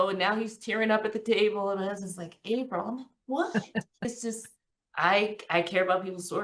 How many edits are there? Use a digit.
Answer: 1